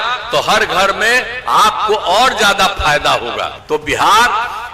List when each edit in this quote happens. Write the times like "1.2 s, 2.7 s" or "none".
3.6 s